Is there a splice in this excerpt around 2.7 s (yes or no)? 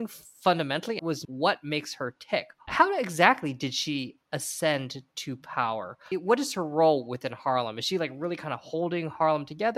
yes